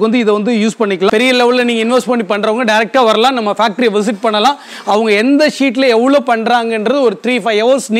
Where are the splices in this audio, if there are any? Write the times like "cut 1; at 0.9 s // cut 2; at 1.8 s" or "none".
cut 1; at 1.1 s